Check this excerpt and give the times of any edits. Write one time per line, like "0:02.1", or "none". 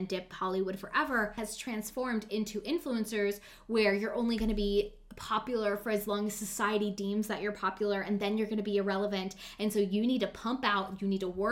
0:01.4